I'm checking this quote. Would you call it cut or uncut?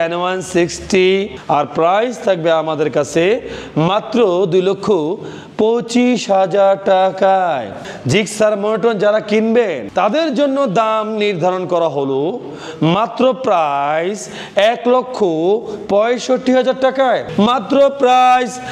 cut